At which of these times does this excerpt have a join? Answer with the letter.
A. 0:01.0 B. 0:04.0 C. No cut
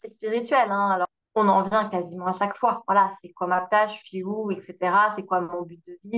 A